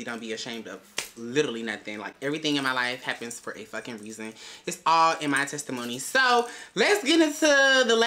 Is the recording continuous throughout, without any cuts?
yes; 0 cuts

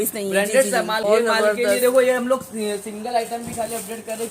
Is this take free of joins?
no; 1 cut; at 1.0 s

